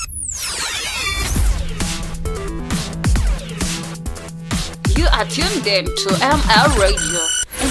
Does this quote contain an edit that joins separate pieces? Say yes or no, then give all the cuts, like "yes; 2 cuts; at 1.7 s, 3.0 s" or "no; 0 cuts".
no; 0 cuts